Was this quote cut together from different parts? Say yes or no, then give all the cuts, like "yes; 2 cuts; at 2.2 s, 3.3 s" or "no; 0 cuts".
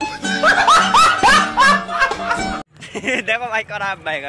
no; 0 cuts